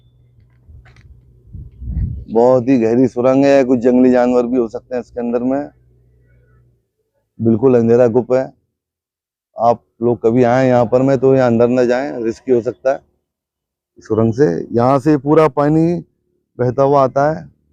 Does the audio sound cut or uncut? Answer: uncut